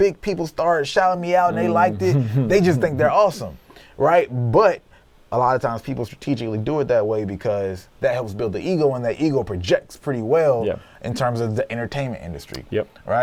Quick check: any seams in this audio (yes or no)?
no